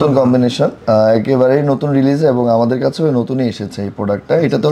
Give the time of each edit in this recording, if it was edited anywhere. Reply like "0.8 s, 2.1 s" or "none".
none

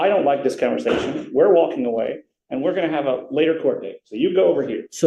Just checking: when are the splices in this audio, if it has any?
none

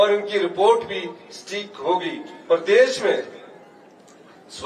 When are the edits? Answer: none

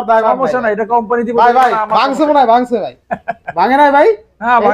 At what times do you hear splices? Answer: none

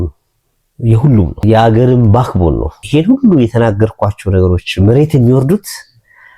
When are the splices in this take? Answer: 1.4 s, 2.8 s

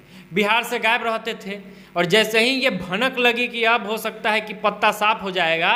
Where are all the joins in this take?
none

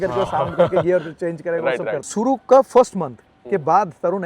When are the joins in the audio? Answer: 2.0 s

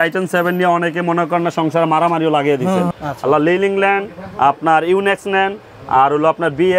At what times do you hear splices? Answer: 2.9 s

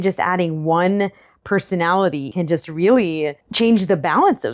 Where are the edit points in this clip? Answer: 2.3 s

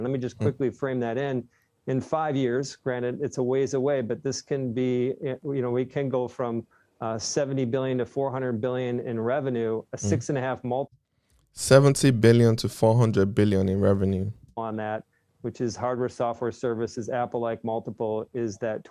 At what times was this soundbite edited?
14.6 s

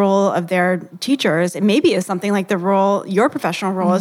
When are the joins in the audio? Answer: 0.9 s

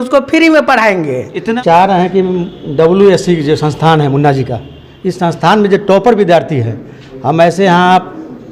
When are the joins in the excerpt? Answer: 1.6 s

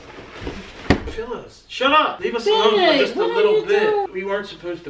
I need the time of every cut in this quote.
2.2 s, 4.1 s

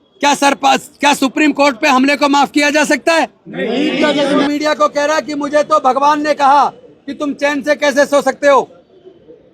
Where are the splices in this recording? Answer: 4.4 s

